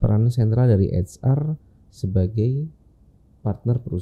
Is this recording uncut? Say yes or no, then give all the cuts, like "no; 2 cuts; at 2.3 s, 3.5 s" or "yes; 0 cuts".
yes; 0 cuts